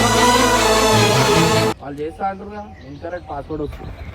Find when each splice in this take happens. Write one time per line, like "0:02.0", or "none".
0:01.7